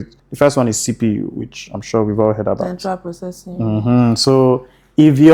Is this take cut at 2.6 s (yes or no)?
no